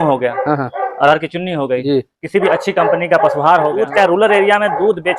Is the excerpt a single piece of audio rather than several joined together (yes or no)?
no